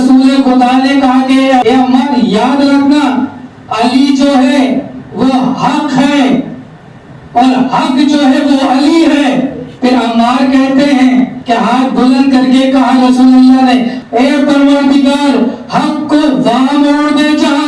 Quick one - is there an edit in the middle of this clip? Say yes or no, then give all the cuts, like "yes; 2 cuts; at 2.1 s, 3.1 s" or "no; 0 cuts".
yes; 3 cuts; at 9.6 s, 11.4 s, 14.0 s